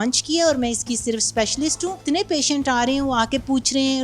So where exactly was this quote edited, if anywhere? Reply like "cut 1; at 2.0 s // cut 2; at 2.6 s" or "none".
cut 1; at 2.0 s